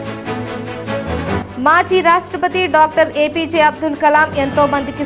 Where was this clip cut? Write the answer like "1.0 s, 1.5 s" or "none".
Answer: none